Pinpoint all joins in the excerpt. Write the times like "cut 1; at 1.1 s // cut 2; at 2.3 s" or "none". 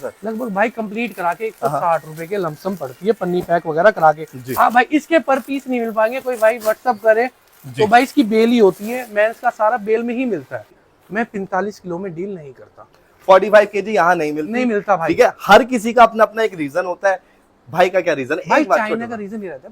cut 1; at 10.7 s

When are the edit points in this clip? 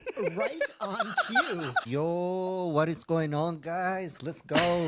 cut 1; at 1.9 s

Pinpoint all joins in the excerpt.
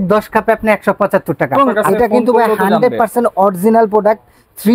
cut 1; at 1.8 s

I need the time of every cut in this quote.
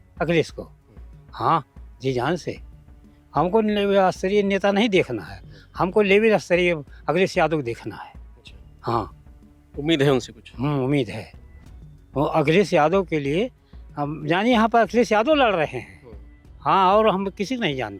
none

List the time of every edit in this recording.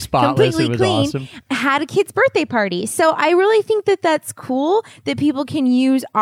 cut 1; at 1.4 s

